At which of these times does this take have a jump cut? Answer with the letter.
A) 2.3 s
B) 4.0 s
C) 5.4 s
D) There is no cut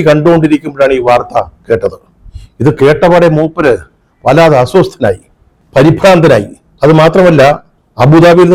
D